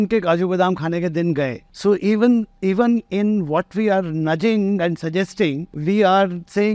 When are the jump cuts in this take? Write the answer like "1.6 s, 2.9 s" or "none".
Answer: 1.6 s, 5.7 s